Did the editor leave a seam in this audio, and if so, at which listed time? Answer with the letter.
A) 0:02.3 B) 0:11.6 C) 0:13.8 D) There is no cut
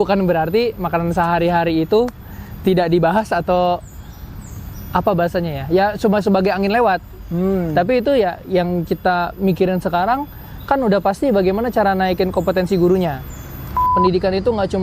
C